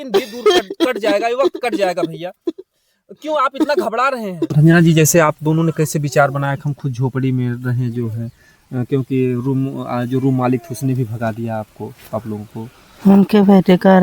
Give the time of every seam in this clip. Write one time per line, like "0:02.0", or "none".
0:04.5